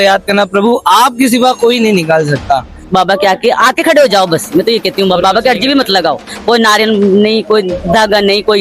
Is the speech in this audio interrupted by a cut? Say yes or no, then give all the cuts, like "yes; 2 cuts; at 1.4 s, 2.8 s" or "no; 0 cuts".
yes; 1 cut; at 2.8 s